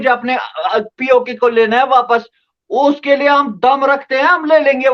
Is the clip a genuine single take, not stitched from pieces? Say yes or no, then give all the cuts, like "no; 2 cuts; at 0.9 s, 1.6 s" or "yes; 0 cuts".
yes; 0 cuts